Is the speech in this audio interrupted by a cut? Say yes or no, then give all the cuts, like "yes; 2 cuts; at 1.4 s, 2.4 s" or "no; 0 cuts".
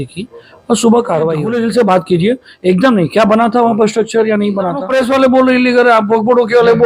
yes; 2 cuts; at 1.5 s, 4.8 s